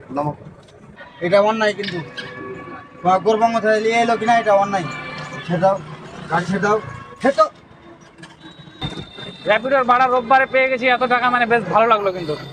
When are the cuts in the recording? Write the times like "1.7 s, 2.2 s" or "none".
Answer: 1.0 s, 8.8 s